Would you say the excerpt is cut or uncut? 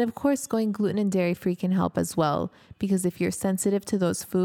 uncut